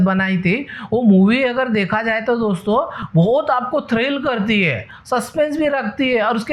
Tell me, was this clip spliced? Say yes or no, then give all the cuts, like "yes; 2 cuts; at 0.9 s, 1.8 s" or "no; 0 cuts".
no; 0 cuts